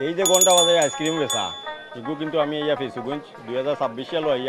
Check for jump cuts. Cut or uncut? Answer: uncut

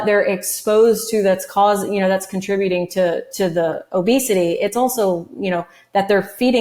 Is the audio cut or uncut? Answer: uncut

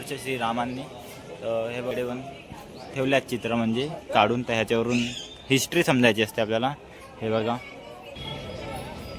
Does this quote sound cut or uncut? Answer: cut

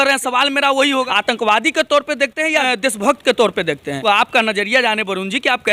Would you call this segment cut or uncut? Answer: cut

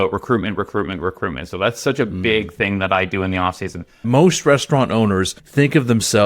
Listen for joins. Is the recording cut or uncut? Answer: cut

